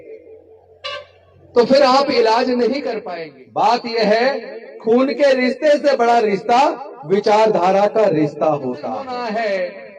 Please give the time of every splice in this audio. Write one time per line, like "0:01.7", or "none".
0:03.0
0:09.1